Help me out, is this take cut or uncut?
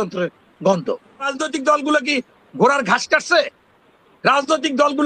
cut